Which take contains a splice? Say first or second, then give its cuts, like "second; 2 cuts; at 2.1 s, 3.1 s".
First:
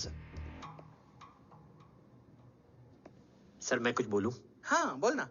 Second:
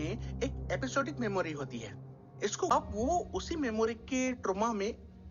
second; 1 cut; at 2.7 s